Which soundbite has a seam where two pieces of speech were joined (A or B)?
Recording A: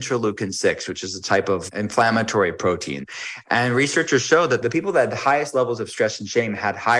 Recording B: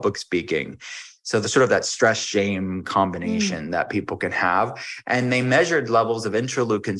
A